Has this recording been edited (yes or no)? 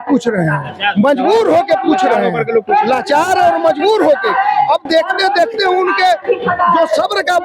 no